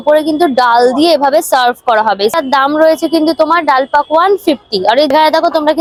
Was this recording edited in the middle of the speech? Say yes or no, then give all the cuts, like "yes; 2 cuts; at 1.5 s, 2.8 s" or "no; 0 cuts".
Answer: no; 0 cuts